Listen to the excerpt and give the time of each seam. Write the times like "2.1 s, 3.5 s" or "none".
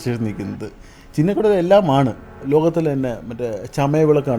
2.3 s